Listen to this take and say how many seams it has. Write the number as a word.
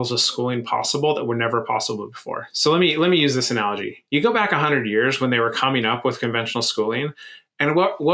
zero